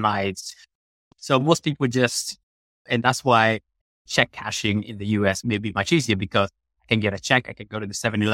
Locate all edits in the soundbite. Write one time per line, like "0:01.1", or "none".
0:01.0
0:05.4